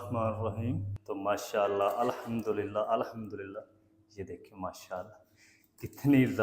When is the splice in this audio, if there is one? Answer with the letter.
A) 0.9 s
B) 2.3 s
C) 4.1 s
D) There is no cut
A